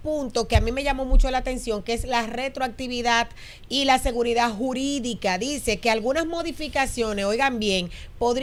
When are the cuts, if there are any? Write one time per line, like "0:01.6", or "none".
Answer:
none

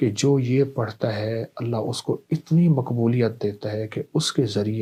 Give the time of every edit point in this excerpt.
none

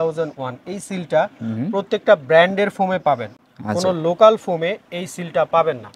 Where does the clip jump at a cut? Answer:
none

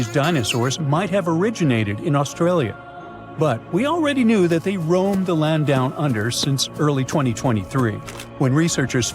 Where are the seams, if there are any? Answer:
none

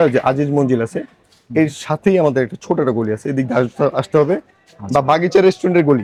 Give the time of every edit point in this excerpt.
none

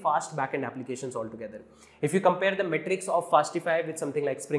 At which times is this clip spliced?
none

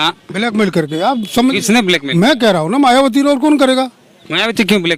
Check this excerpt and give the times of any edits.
none

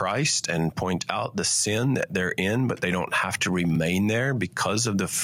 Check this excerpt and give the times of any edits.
none

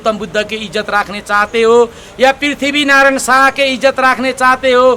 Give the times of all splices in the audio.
none

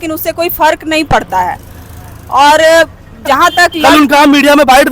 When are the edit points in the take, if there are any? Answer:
0:03.8

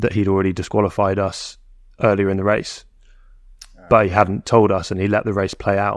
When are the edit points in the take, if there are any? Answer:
none

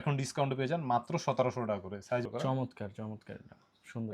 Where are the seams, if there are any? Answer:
0:02.2

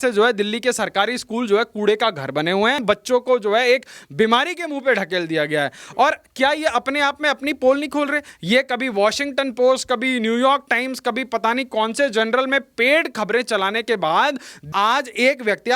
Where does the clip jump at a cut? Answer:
0:02.8
0:14.5

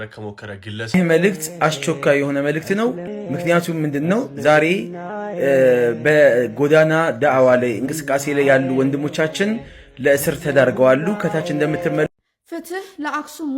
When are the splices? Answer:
0:00.9
0:03.0
0:12.1

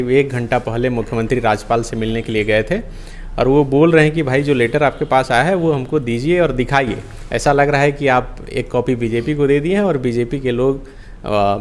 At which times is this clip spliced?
none

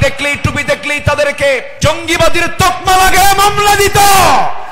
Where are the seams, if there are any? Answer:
0:01.7

